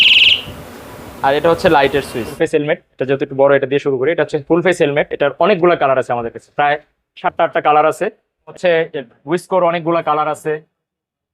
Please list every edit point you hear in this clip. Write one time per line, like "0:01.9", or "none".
0:02.3
0:08.5